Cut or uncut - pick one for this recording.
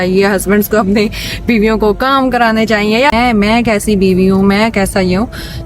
cut